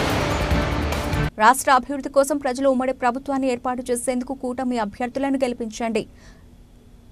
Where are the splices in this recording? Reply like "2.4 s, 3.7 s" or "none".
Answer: 1.3 s